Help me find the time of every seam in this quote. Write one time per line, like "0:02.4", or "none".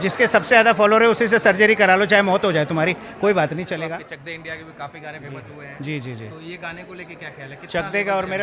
0:03.9